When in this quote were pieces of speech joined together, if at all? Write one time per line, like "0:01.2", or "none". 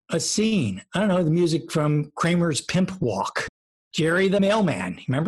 0:03.4